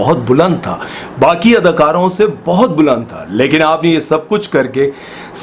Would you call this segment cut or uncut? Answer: uncut